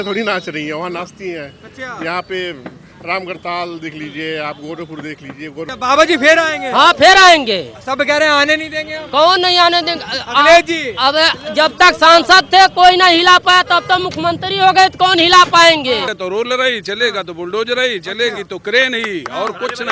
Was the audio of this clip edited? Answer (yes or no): yes